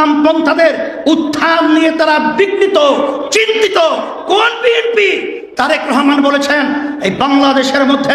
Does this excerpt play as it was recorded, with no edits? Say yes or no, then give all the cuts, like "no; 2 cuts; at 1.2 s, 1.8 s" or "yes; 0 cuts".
yes; 0 cuts